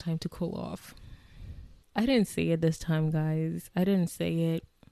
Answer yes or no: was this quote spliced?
yes